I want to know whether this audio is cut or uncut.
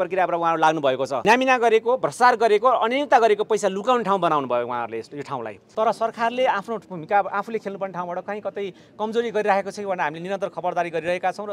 cut